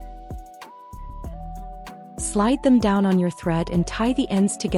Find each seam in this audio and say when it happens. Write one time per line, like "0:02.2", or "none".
0:02.3